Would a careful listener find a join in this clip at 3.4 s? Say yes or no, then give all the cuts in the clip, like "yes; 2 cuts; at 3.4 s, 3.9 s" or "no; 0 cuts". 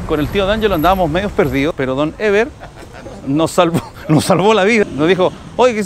no; 2 cuts; at 1.7 s, 4.8 s